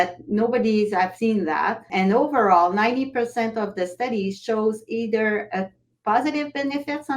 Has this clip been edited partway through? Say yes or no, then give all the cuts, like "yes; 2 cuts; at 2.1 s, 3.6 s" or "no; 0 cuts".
yes; 1 cut; at 1.7 s